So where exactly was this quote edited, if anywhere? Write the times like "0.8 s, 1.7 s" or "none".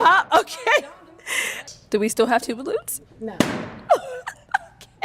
1.7 s